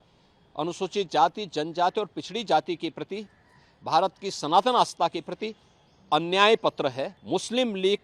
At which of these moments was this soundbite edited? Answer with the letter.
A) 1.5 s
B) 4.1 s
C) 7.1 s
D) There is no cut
C